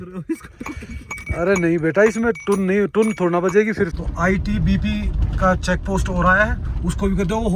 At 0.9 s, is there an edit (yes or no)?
no